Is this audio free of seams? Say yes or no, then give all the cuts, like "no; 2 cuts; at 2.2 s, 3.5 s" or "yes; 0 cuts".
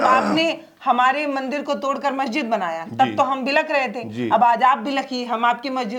yes; 0 cuts